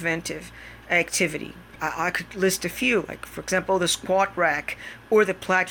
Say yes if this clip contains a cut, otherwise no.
no